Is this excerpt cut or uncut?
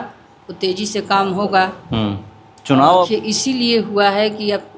cut